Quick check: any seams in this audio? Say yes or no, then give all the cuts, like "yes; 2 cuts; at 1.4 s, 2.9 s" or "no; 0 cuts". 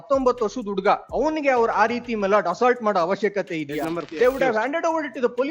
yes; 2 cuts; at 1.1 s, 4.1 s